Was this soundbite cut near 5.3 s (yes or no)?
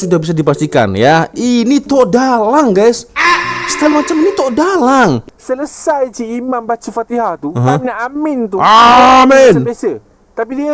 yes